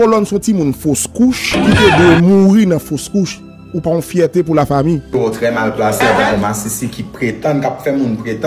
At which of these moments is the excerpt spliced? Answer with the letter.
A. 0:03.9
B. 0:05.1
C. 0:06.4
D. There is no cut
B